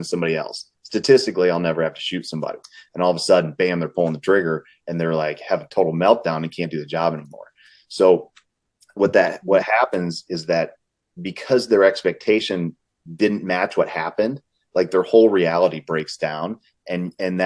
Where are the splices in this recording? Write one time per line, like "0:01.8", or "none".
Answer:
none